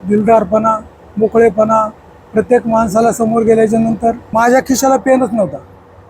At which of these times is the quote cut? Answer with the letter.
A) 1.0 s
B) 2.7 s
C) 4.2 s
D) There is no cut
C